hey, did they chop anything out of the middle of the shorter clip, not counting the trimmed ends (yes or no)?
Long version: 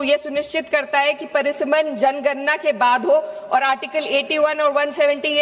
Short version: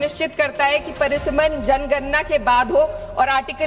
no